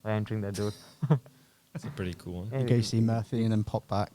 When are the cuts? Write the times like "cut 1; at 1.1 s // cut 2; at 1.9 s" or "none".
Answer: none